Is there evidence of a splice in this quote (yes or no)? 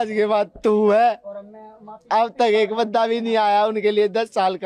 no